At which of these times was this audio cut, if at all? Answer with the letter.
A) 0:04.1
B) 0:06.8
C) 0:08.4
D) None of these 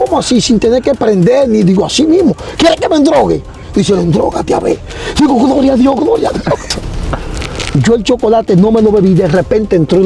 B